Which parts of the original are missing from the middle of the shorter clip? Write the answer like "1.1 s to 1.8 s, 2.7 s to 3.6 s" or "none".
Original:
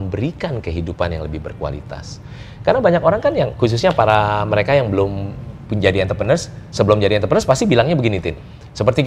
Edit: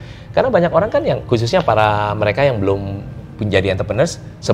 none